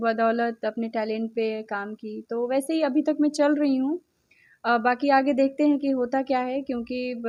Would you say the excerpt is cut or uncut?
uncut